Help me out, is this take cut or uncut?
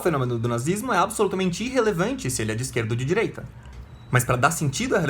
uncut